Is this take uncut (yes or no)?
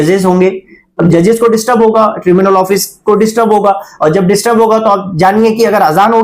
no